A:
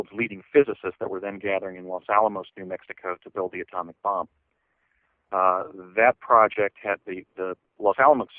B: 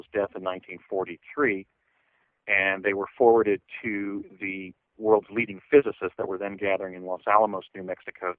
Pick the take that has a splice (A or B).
B